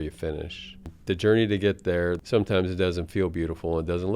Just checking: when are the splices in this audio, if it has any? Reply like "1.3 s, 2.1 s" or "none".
0.9 s, 2.2 s

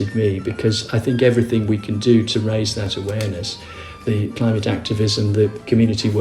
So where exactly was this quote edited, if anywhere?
none

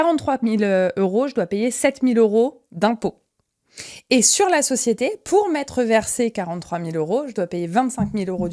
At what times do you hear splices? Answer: none

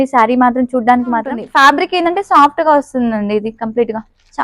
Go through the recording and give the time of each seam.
1.4 s

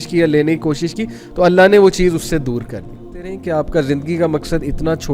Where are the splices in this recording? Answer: 3.3 s

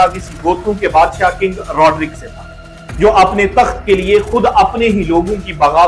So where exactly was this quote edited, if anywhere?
none

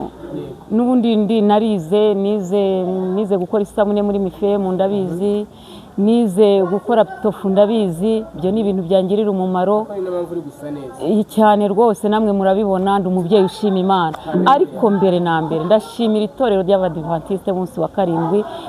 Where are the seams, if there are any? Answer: none

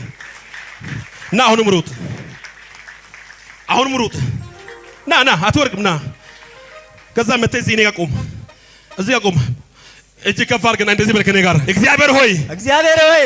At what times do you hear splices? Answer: 11.6 s

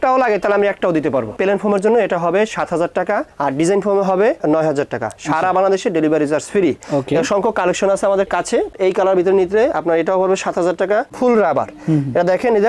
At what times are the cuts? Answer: 1.3 s, 8.7 s, 11.1 s

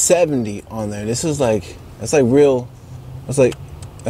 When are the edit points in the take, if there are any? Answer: none

